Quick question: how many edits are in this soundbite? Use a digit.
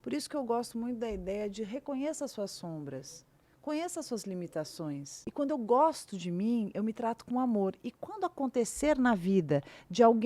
1